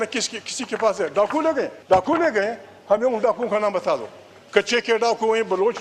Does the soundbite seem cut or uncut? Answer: cut